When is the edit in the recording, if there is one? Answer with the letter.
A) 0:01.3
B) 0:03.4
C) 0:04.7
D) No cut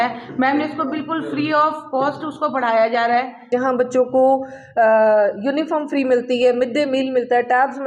B